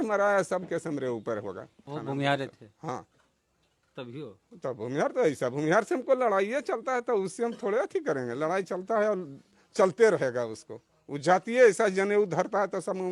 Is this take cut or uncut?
cut